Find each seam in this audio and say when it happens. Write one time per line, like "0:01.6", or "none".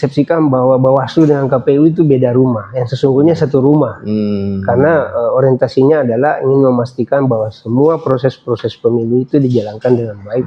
none